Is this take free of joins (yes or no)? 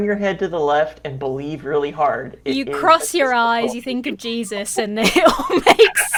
yes